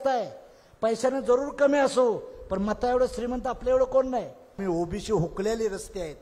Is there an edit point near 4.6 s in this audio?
yes; 1 cut; at 4.6 s

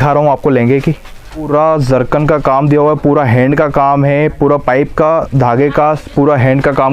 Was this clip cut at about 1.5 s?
yes; 1 cut; at 1.5 s

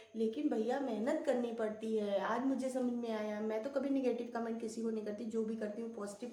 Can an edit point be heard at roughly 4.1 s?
no; 0 cuts

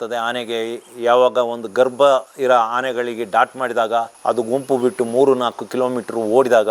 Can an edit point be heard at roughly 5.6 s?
no; 2 cuts; at 2.3 s, 4.1 s

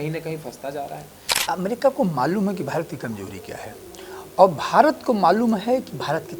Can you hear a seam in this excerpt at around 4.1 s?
no; 1 cut; at 1.3 s

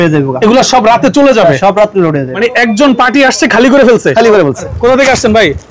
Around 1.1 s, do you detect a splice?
no; 2 cuts; at 2.3 s, 4.7 s

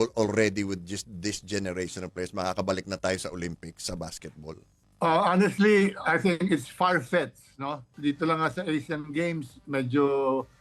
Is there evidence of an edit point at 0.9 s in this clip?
no; 0 cuts

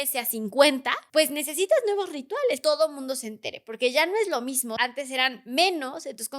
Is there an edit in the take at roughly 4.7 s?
yes; 3 cuts; at 1.0 s, 2.6 s, 4.7 s

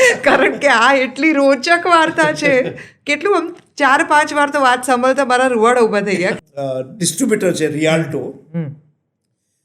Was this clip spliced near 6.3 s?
yes; 1 cut; at 6.3 s

